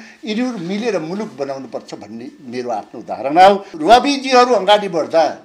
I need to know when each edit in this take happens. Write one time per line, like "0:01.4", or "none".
0:03.7